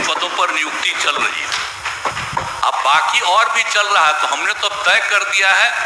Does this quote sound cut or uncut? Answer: uncut